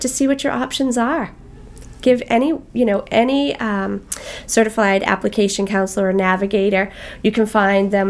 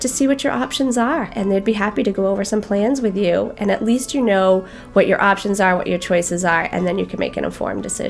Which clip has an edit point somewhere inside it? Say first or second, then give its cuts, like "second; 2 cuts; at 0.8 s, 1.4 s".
second; 1 cut; at 1.3 s